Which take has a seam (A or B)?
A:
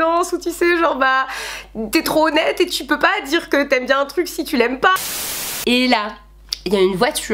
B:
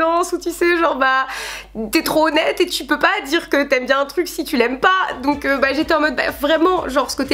A